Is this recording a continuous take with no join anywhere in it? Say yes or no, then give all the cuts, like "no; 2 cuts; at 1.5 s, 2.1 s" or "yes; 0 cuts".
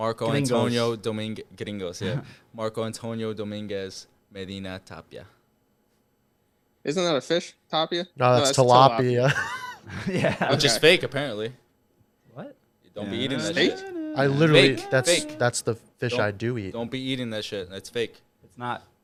yes; 0 cuts